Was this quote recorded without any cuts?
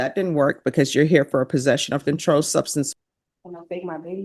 no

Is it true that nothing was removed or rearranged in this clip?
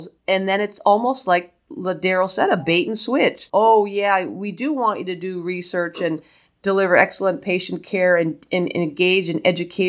no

